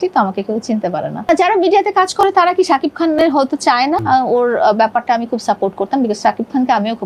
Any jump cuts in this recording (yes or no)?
yes